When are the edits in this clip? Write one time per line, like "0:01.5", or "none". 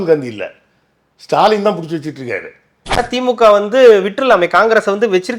0:03.1